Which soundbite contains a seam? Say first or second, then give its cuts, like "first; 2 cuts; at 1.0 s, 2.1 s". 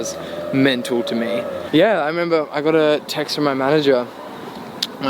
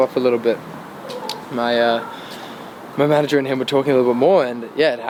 first; 1 cut; at 1.6 s